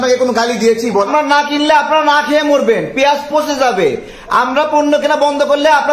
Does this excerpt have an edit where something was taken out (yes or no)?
yes